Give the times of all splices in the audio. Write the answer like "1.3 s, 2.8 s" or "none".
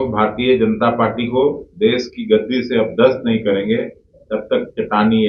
none